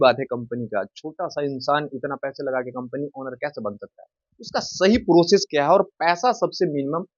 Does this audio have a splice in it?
no; 0 cuts

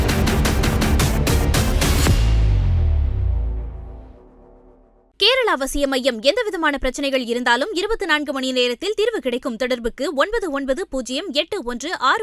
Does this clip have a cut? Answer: no; 0 cuts

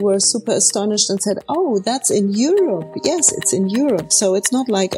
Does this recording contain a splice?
no; 0 cuts

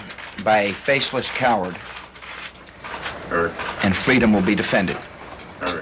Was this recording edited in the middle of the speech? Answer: yes; 1 cut; at 2.9 s

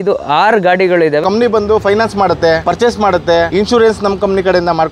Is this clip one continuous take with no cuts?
no; 3 cuts; at 1.2 s, 2.6 s, 3.5 s

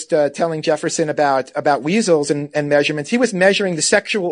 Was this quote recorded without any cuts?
yes; 0 cuts

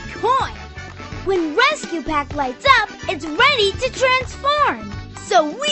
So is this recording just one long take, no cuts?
yes; 0 cuts

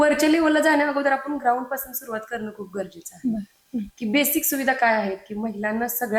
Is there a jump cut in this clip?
no; 0 cuts

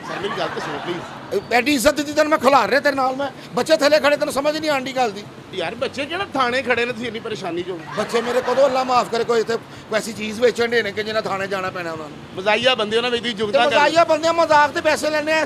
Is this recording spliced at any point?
no; 0 cuts

